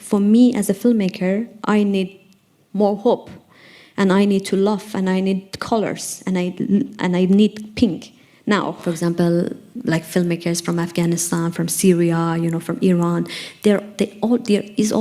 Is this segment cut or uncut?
cut